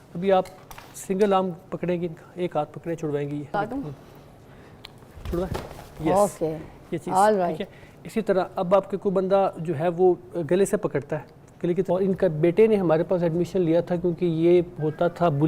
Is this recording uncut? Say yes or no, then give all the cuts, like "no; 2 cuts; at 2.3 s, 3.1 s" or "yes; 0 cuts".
no; 2 cuts; at 3.5 s, 11.9 s